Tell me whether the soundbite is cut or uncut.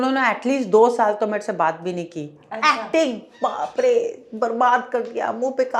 uncut